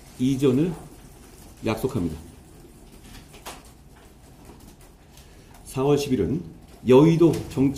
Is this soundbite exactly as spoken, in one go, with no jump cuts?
yes; 0 cuts

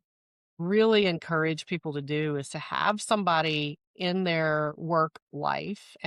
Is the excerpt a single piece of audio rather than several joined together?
yes; 0 cuts

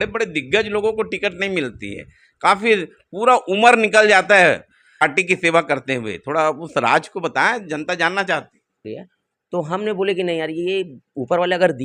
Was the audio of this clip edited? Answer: yes; 2 cuts; at 5.0 s, 8.8 s

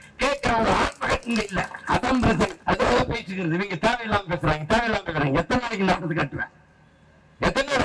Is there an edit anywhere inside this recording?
yes; 1 cut; at 2.6 s

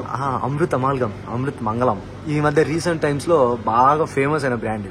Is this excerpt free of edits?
yes; 0 cuts

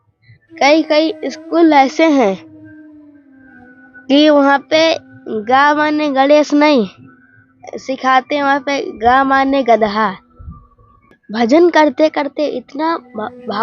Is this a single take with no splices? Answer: no; 1 cut; at 11.2 s

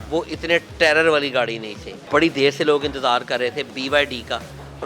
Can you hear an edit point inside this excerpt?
yes; 1 cut; at 2.0 s

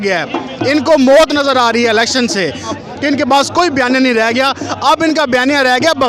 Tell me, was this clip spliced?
yes; 1 cut; at 2.7 s

